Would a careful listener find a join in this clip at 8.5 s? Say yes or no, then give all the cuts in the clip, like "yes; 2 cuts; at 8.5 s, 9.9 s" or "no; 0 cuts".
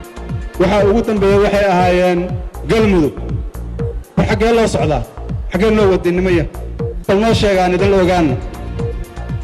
yes; 1 cut; at 8.5 s